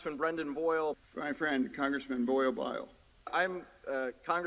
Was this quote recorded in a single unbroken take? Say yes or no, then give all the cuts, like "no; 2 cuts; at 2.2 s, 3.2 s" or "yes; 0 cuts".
yes; 0 cuts